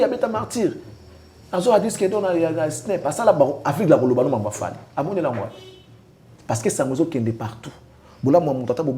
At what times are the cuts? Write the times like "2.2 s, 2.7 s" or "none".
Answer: none